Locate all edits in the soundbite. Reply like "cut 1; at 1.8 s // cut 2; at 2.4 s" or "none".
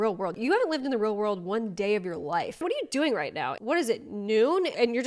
cut 1; at 2.6 s